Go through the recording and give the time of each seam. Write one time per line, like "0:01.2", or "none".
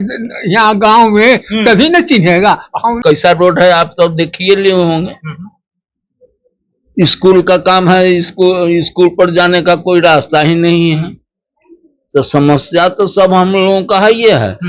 0:03.0